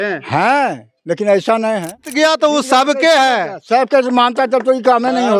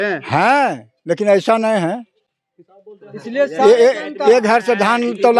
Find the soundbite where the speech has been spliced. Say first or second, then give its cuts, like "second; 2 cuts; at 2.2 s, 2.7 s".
first; 1 cut; at 2.1 s